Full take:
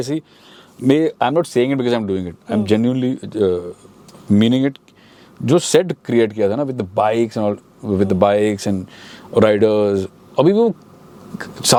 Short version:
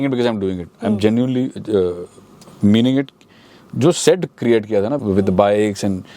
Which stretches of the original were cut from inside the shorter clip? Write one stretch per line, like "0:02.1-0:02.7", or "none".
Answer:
0:06.7-0:07.8